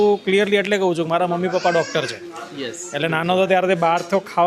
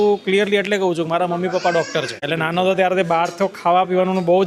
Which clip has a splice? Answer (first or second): second